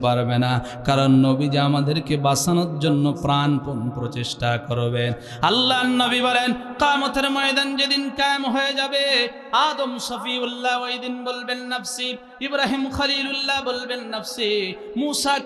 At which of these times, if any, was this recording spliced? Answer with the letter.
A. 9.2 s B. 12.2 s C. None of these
C